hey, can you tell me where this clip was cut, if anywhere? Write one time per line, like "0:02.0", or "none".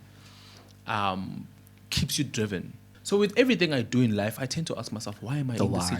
0:02.8

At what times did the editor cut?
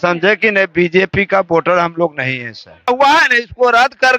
0:02.9

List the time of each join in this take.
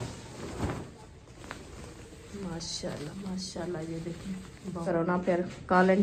0:04.9

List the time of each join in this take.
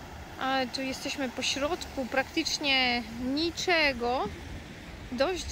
none

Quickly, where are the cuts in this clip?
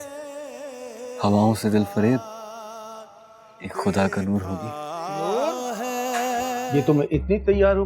0:06.7

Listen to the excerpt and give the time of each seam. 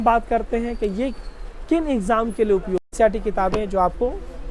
0:02.9

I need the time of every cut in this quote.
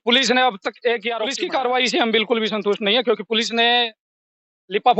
0:01.3

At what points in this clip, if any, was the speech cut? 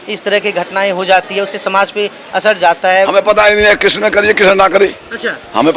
none

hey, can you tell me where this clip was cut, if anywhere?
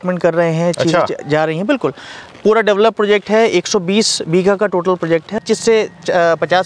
0:05.4

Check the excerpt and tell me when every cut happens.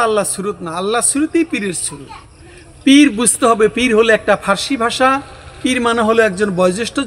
none

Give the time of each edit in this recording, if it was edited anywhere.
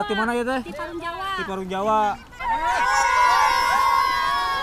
0:02.3

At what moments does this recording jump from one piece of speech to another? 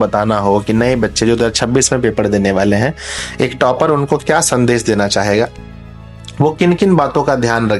none

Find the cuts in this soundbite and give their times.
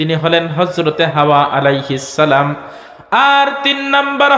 none

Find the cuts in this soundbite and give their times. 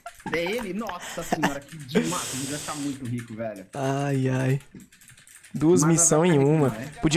none

